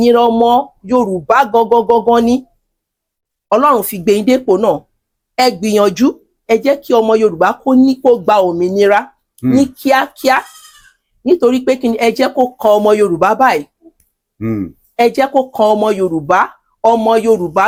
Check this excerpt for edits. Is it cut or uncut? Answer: uncut